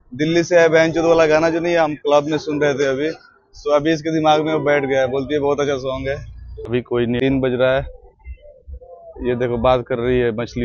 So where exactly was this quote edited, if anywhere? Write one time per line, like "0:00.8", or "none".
0:06.7

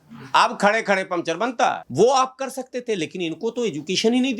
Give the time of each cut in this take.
0:01.8

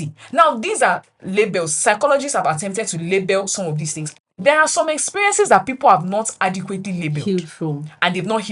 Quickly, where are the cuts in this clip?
0:04.0

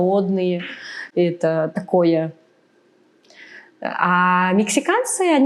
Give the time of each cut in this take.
none

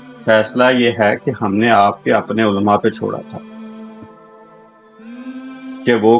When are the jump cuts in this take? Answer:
none

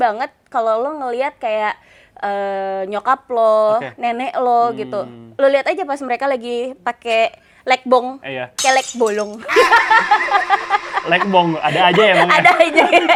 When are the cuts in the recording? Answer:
none

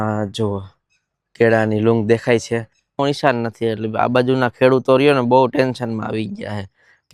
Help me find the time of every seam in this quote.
0:03.0

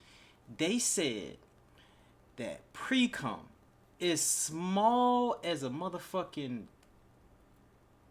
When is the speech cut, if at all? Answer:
none

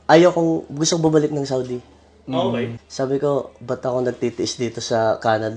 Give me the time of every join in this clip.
0:02.7

